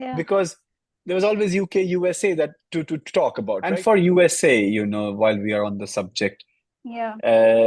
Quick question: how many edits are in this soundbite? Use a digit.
1